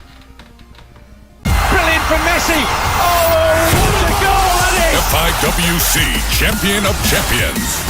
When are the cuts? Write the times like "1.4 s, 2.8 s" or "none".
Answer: none